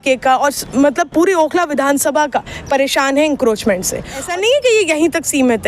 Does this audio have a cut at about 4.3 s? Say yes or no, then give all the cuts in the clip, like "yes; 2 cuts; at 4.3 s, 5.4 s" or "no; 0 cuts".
yes; 1 cut; at 4.3 s